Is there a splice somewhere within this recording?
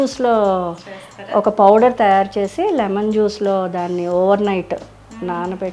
no; 0 cuts

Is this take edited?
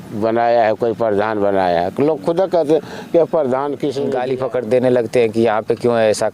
yes; 1 cut; at 4.0 s

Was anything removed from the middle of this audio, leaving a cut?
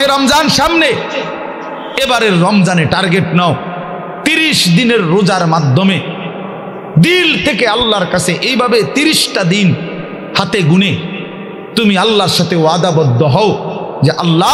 no; 0 cuts

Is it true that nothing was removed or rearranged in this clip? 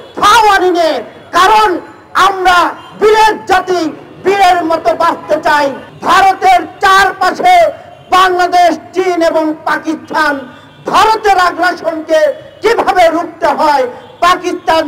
no; 1 cut; at 5.9 s

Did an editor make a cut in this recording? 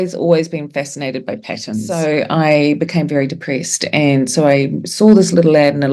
yes; 1 cut; at 1.9 s

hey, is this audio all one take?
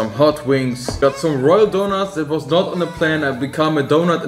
no; 1 cut; at 0.9 s

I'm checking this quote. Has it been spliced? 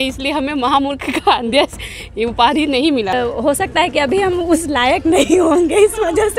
yes; 1 cut; at 3.1 s

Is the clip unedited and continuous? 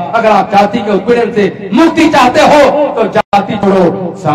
yes; 0 cuts

